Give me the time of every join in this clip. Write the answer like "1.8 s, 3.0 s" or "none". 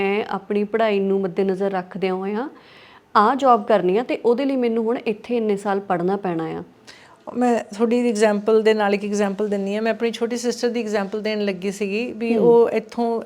none